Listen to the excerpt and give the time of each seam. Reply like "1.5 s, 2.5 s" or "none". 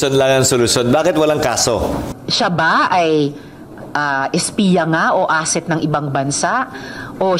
2.2 s